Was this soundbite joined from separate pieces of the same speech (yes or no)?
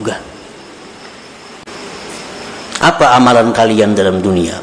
yes